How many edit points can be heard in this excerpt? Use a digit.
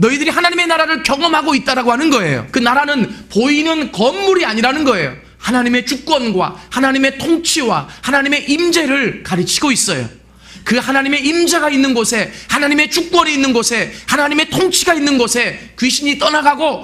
1